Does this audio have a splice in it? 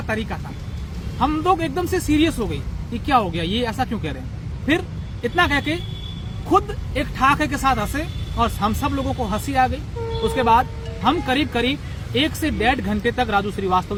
no; 0 cuts

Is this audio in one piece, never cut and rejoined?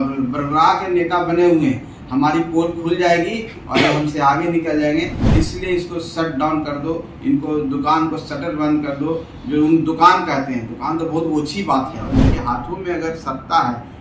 no; 1 cut; at 12.1 s

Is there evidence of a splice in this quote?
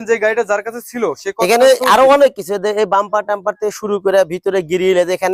no; 0 cuts

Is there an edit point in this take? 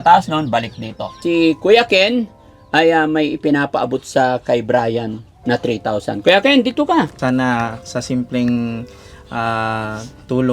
yes; 2 cuts; at 1.1 s, 7.1 s

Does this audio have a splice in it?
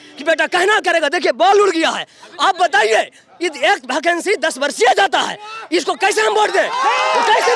no; 0 cuts

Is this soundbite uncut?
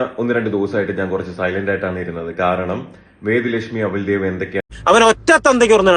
no; 1 cut; at 4.7 s

